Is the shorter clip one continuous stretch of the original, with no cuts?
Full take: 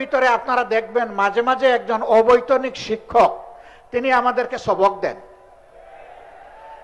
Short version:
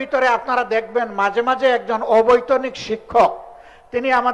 yes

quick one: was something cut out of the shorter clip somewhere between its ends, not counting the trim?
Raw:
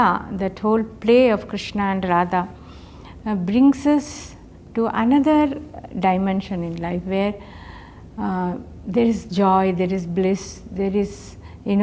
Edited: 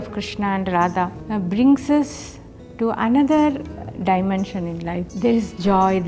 yes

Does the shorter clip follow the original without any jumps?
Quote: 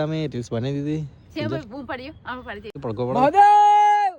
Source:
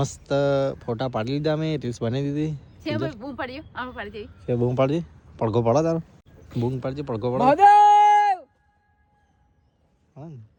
no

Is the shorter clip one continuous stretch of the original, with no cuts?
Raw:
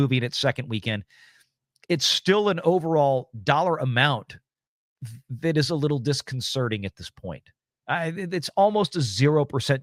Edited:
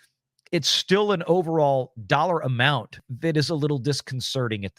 no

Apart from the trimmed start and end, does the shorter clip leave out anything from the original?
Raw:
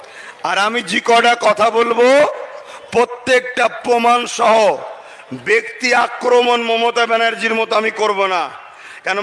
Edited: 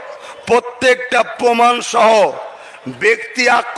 no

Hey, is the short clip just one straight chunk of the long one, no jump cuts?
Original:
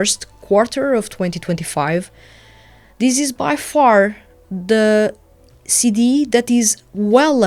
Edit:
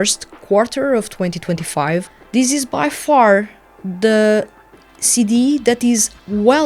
no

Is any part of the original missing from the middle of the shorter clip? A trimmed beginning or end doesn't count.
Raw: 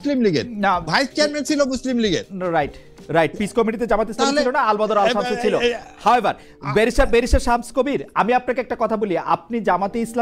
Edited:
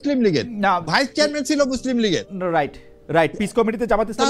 no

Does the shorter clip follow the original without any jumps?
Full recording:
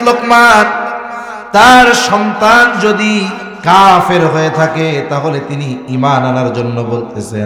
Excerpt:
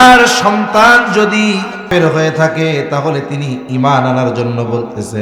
no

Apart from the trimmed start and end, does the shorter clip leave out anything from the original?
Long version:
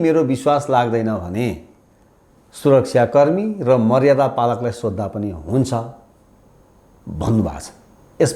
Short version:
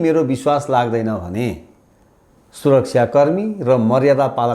no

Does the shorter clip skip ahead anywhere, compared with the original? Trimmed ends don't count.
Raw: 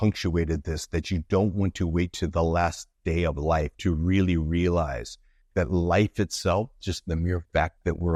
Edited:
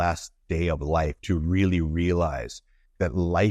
no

